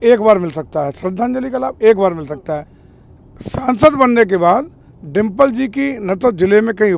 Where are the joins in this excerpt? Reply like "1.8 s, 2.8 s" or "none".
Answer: 2.8 s